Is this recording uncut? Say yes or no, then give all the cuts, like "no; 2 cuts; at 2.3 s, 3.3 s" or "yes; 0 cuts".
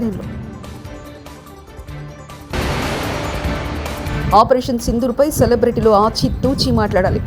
no; 2 cuts; at 2.4 s, 4.2 s